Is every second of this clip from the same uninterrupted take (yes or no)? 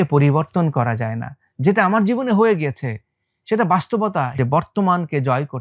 no